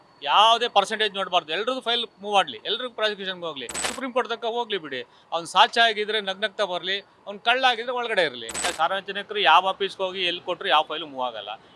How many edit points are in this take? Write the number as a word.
two